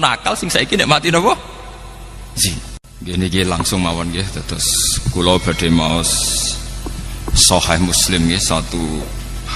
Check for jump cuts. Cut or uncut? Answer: cut